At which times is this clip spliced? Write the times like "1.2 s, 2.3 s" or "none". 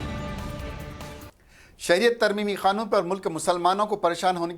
1.4 s